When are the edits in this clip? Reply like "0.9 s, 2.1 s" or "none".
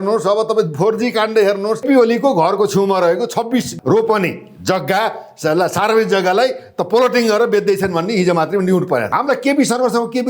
1.8 s, 3.7 s, 9.1 s

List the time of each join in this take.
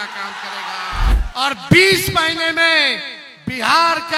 1.1 s

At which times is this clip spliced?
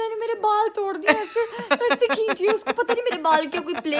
none

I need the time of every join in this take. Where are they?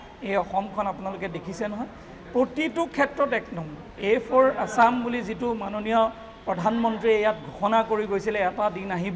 3.9 s

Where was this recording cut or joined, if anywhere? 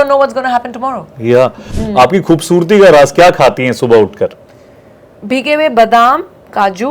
1.8 s

